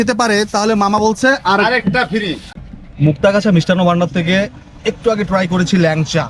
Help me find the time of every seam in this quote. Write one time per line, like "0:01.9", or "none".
0:02.5